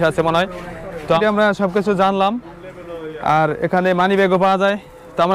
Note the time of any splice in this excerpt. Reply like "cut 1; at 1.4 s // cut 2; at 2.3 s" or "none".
cut 1; at 1.2 s

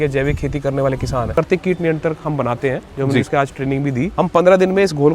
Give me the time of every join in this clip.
cut 1; at 1.4 s // cut 2; at 4.1 s

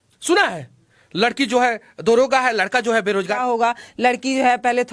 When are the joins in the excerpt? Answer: cut 1; at 3.4 s

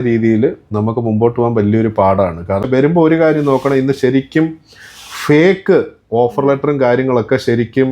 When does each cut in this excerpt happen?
cut 1; at 2.6 s

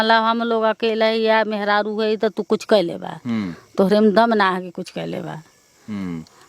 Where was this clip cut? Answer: none

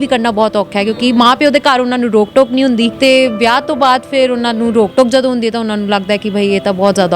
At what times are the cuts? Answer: cut 1; at 2.9 s

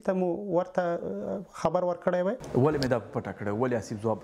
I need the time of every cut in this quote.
cut 1; at 2.4 s

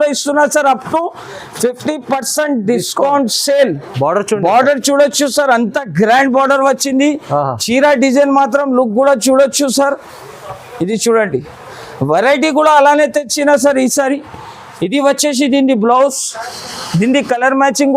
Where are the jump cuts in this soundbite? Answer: none

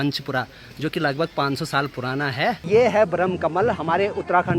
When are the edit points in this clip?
cut 1; at 2.6 s

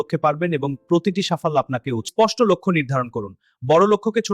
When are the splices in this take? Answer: cut 1; at 2.0 s

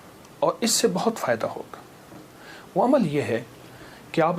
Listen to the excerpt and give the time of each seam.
none

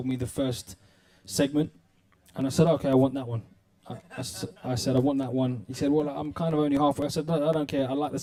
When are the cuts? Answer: none

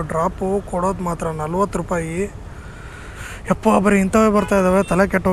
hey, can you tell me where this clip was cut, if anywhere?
none

